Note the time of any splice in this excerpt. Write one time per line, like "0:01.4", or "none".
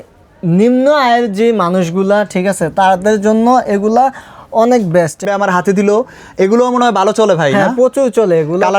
0:05.2

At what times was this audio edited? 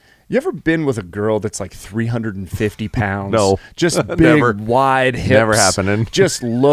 none

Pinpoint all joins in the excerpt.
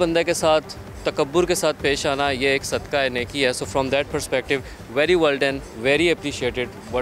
none

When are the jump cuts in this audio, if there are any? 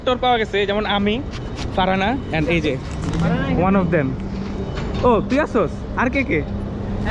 none

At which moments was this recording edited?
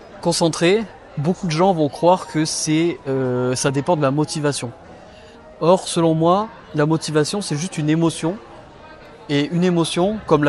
none

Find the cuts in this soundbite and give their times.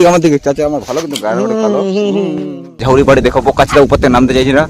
0:02.8

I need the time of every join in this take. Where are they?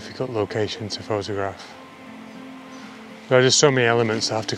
none

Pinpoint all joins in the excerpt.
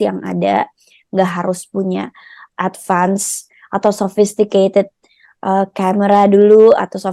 none

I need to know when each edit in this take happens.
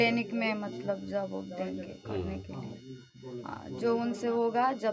none

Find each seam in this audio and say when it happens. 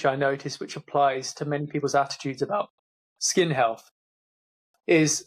none

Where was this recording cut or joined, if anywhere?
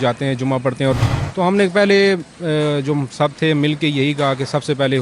0:01.1

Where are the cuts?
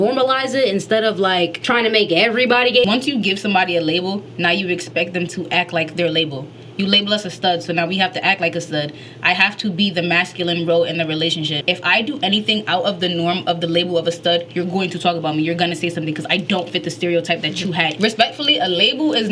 0:01.6
0:02.9
0:11.5
0:17.9

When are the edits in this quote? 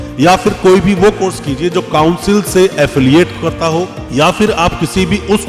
none

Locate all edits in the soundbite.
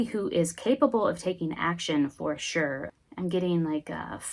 0:02.9

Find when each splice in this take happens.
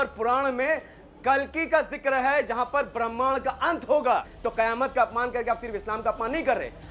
0:04.3

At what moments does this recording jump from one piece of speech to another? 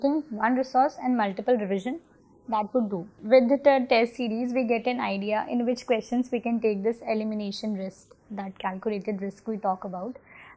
0:03.1

